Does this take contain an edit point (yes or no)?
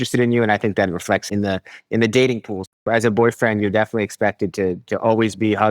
yes